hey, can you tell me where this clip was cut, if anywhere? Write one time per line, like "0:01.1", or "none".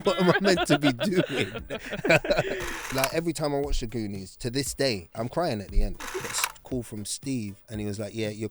0:02.9
0:06.0
0:07.6